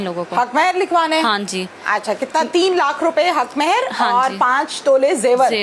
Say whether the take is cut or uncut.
uncut